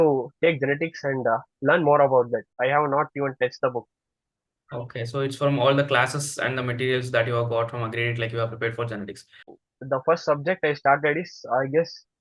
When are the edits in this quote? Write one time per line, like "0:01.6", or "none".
0:02.5
0:09.5